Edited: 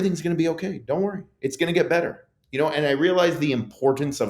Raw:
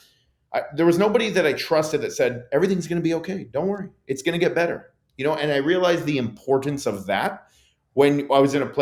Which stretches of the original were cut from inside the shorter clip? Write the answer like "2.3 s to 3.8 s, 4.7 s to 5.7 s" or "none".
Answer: none

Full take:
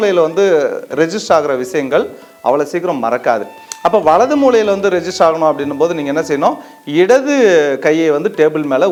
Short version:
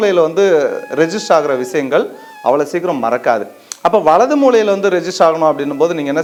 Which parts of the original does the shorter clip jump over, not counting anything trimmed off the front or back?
none

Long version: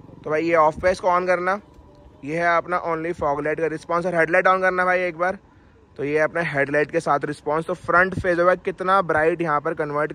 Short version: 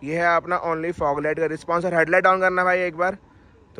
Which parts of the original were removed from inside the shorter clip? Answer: none

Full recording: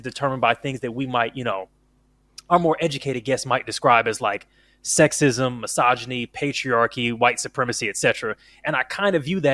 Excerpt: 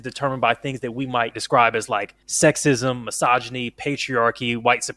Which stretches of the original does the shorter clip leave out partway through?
1.4 s to 3.7 s, 4.5 s to 4.7 s

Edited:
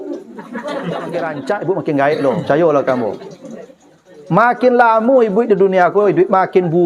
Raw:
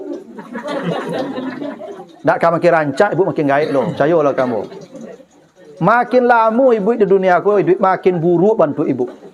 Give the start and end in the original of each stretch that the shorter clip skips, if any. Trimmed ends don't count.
1.2 s to 2.7 s

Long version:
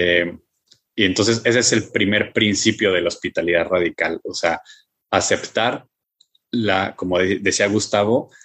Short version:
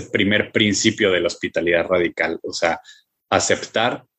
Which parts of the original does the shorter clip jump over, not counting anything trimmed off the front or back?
none

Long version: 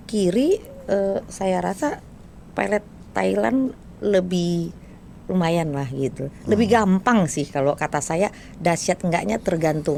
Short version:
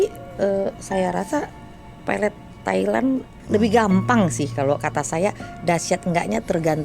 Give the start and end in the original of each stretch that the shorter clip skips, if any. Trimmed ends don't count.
3.8 s to 6.3 s

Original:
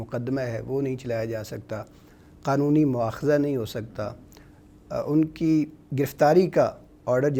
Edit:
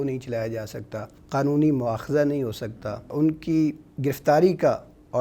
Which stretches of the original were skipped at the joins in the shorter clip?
1.9 s to 2.3 s, 4.2 s to 5.0 s

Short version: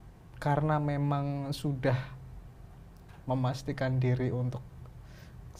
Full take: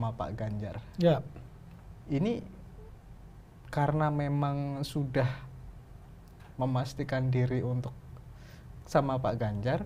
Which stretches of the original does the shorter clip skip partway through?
none

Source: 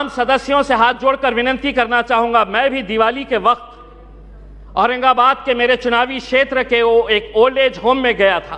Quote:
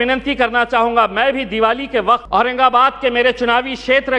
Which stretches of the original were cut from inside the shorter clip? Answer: 3.6 s to 4.7 s

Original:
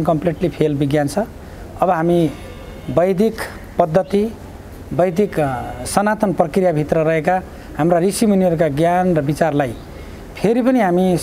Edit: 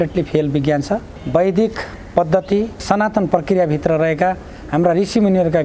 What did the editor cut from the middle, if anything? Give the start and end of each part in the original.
1.4 s to 2.8 s, 4.4 s to 5.8 s

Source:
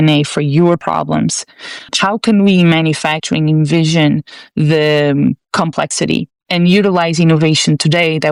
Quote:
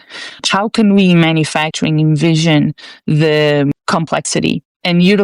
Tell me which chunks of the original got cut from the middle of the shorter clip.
5.2 s to 5.4 s

